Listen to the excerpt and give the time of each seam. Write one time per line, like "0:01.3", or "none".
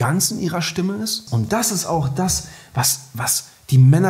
0:01.2